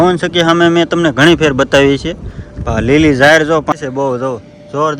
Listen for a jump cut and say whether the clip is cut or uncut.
cut